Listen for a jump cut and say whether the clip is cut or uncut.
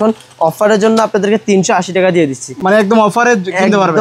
uncut